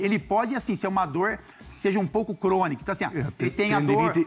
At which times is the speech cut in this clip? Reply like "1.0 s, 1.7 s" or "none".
none